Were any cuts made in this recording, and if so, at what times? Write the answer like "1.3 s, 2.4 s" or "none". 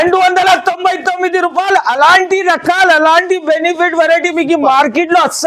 none